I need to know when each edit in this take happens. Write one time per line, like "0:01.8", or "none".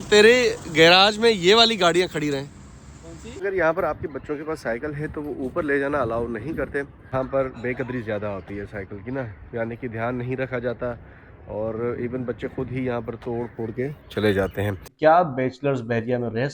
0:03.4
0:07.0
0:14.8